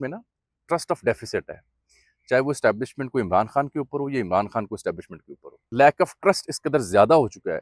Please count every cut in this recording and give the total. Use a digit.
1